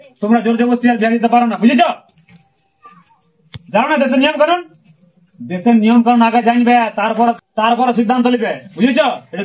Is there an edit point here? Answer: no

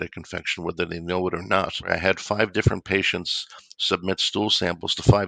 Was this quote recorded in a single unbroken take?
no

